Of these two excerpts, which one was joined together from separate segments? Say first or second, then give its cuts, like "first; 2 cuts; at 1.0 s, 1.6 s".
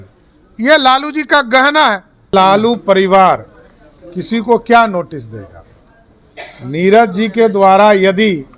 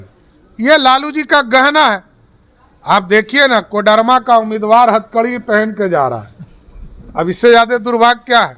first; 1 cut; at 2.3 s